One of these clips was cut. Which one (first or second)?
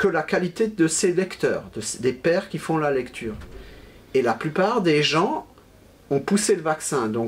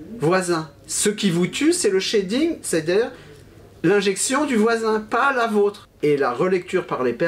second